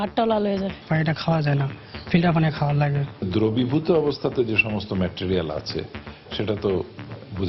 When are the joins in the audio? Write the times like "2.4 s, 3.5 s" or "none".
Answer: 3.3 s